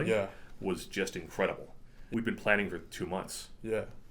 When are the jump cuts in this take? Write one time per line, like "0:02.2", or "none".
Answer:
0:01.9